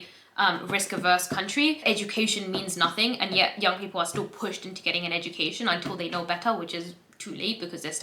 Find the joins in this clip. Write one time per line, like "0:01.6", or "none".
0:01.8